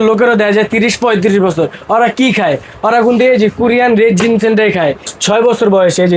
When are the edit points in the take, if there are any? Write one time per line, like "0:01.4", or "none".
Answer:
0:05.1

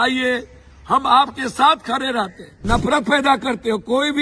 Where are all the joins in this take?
0:02.5

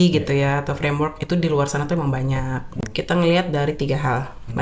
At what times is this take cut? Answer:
0:02.7

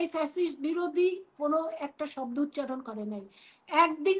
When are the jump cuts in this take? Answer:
none

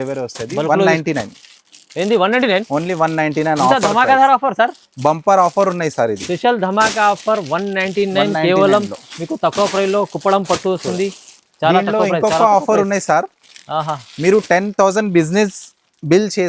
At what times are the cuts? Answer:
none

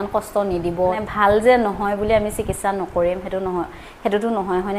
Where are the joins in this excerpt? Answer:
0:01.0

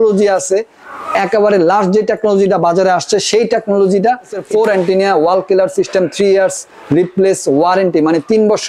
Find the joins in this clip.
0:04.4

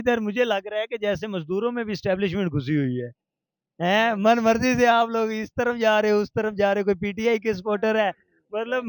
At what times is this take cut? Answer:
none

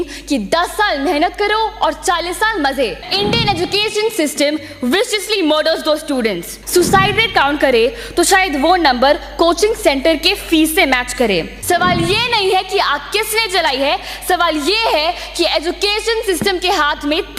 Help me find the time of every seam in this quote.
0:03.1
0:06.5
0:11.5

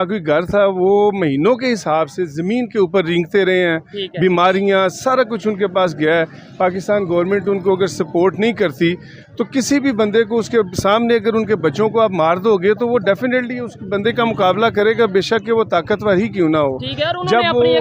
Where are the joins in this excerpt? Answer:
none

